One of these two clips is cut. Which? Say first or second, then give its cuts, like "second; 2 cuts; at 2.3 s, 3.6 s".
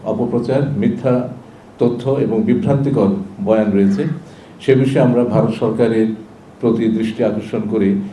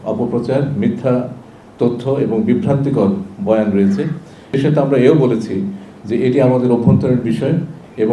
second; 1 cut; at 4.6 s